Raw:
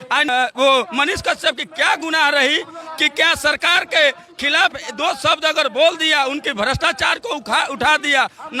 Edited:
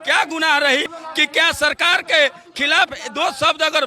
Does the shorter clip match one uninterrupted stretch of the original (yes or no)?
no